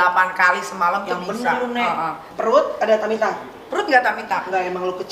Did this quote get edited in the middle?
yes; 1 cut; at 2.2 s

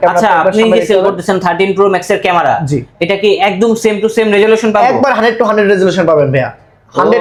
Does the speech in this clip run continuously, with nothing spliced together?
yes; 0 cuts

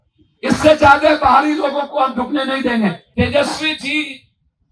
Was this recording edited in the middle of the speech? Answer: yes; 1 cut; at 3.0 s

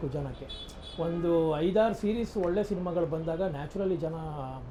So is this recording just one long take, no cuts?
yes; 0 cuts

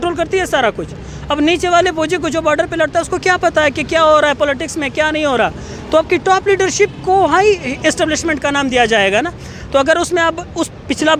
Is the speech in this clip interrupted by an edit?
no; 0 cuts

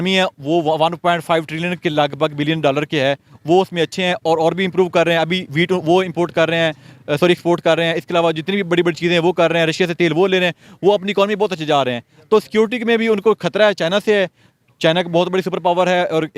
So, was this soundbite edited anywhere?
no; 0 cuts

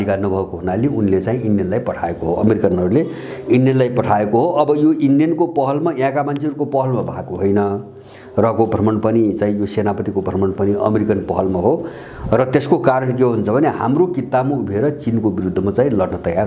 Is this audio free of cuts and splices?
yes; 0 cuts

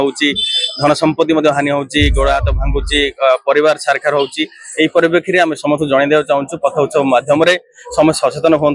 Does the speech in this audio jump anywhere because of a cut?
no; 0 cuts

